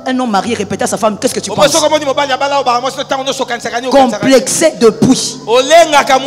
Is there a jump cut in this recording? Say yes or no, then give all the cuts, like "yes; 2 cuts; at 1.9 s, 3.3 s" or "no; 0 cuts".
no; 0 cuts